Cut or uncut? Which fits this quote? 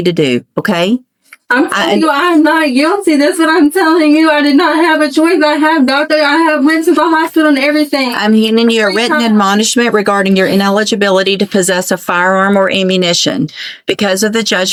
uncut